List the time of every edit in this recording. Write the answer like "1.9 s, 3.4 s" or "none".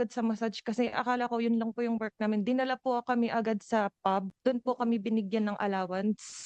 4.3 s